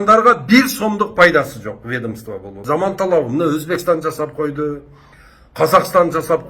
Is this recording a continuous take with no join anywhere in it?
no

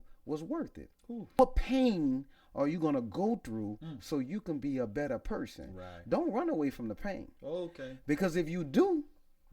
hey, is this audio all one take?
no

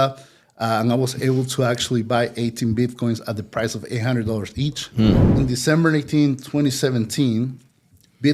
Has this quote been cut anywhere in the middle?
yes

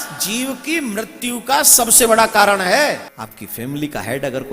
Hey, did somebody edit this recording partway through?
yes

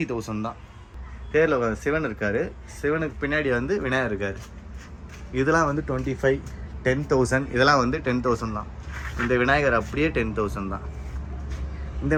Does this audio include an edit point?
no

